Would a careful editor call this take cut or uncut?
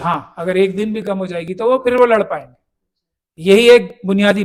uncut